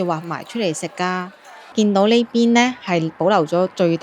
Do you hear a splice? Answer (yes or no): yes